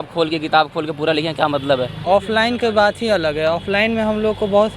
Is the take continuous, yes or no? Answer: no